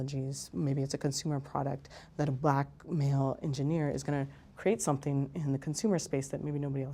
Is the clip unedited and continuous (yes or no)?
yes